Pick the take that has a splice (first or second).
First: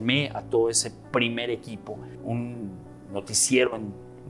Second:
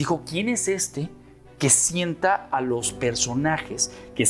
first